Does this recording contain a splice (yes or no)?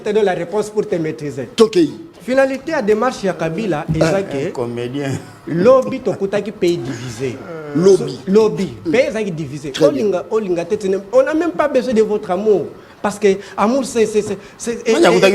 yes